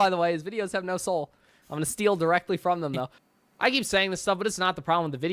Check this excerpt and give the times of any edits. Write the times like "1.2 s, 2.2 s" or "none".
3.1 s